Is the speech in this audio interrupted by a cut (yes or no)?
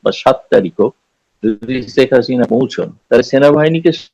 yes